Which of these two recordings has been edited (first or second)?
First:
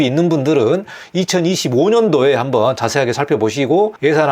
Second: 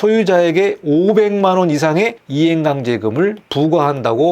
second